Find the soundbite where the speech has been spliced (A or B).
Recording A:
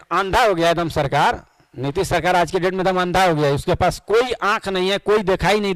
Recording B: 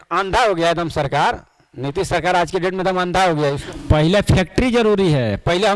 B